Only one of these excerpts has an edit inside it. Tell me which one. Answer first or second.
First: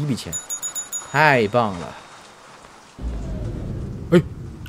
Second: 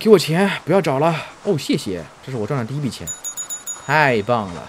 first